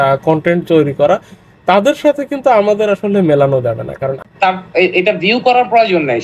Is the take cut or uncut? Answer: cut